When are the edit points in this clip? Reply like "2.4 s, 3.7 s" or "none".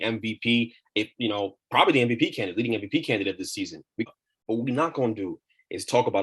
4.1 s